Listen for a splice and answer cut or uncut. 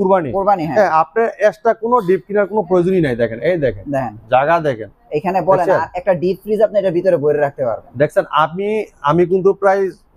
uncut